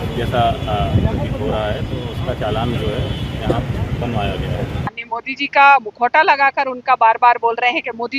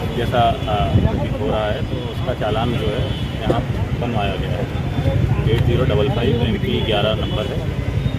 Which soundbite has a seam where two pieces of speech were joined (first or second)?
first